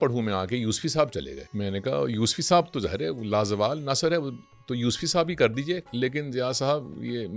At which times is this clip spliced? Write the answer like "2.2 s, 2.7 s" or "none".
1.4 s, 5.9 s

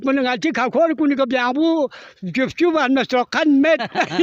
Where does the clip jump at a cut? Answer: none

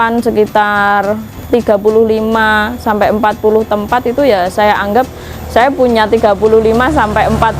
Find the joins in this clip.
1.3 s

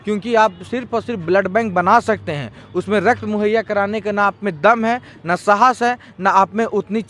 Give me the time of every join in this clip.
none

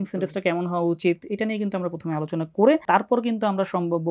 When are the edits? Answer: 2.8 s

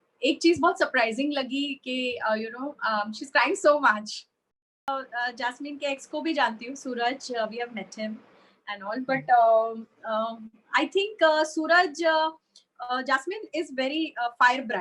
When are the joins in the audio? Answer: 4.9 s

